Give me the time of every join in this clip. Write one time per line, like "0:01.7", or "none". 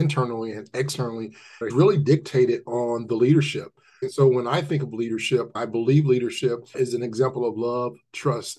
0:01.7
0:05.5